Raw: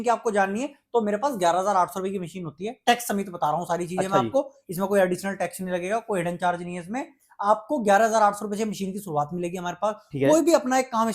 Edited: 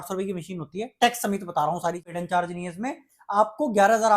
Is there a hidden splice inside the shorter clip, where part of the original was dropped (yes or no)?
yes